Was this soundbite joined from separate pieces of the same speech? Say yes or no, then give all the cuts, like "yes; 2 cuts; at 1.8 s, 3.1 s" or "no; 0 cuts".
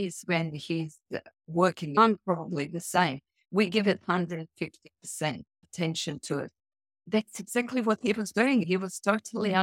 yes; 4 cuts; at 2.0 s, 5.6 s, 7.0 s, 8.6 s